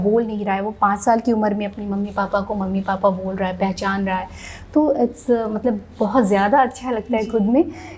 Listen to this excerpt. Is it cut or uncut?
uncut